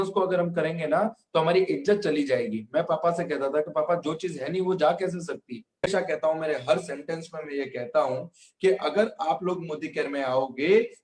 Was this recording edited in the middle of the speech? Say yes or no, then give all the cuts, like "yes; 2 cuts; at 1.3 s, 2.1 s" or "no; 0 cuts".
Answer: yes; 1 cut; at 5.9 s